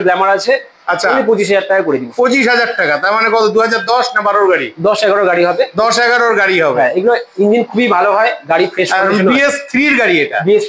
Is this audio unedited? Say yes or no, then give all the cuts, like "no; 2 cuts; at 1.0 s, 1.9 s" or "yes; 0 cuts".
yes; 0 cuts